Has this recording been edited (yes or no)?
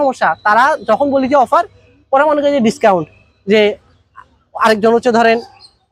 no